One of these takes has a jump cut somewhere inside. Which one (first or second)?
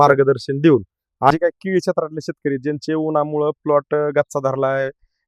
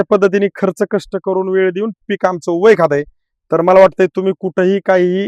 first